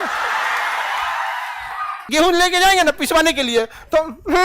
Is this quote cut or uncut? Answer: cut